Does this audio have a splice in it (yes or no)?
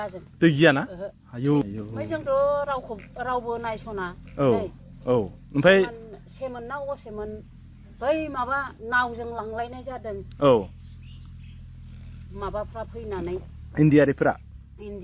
yes